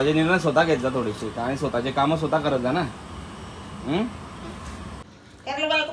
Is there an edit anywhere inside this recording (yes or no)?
yes